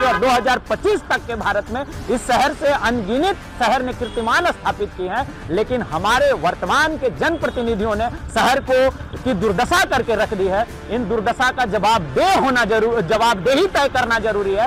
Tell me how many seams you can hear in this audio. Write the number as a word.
zero